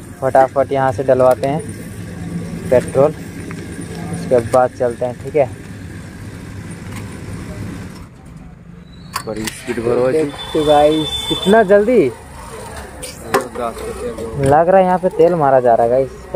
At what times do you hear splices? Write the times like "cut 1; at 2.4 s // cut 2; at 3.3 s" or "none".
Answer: none